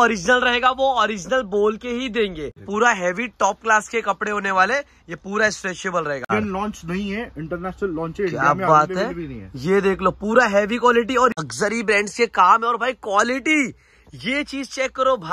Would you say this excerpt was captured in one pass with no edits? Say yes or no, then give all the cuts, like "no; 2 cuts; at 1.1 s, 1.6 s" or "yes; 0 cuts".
no; 3 cuts; at 2.6 s, 6.3 s, 11.4 s